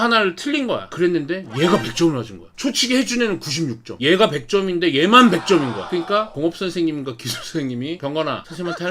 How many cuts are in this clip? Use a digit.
3